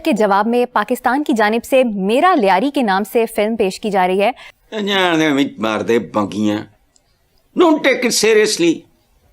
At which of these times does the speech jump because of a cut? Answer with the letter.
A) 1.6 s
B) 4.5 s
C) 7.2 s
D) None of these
B